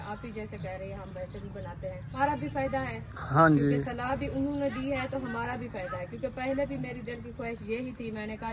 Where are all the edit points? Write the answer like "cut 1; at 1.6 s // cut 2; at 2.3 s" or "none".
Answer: cut 1; at 2.2 s